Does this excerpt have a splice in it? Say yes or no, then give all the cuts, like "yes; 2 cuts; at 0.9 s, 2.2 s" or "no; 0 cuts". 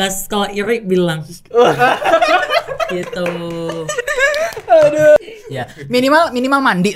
yes; 1 cut; at 5.2 s